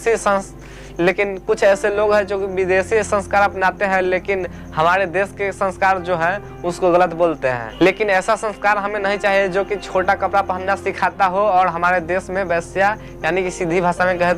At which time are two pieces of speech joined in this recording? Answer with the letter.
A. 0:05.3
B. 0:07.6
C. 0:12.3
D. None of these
B